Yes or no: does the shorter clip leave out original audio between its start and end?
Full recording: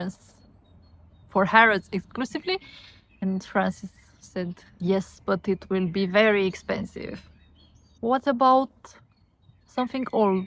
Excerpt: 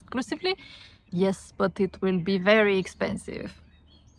yes